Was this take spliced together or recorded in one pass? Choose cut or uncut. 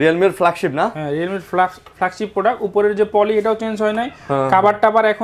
uncut